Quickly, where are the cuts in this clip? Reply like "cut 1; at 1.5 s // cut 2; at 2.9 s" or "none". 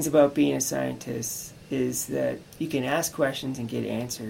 cut 1; at 2.5 s